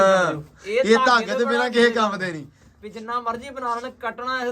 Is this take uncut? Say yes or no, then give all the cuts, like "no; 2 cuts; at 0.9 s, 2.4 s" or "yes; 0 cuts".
yes; 0 cuts